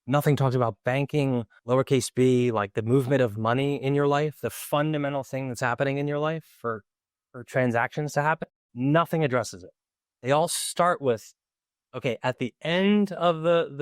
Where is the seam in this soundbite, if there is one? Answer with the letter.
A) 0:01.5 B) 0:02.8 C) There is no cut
A